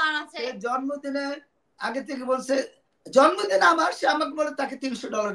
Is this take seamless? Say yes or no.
yes